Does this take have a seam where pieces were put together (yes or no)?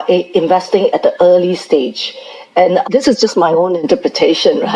yes